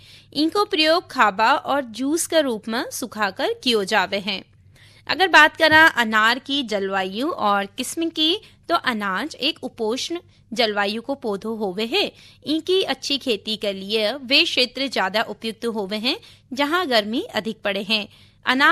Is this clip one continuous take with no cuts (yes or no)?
yes